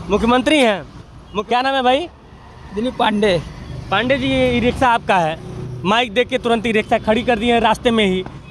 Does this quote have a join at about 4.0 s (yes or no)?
no